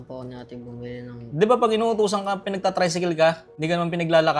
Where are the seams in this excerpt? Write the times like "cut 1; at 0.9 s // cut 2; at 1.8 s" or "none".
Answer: cut 1; at 3.5 s